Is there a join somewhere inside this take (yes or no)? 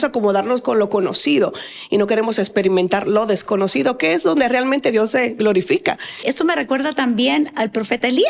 yes